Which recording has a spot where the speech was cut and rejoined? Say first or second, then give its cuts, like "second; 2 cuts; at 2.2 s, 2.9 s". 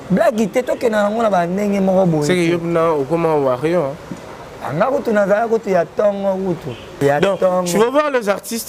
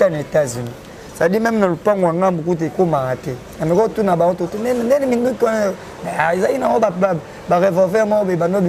first; 1 cut; at 6.9 s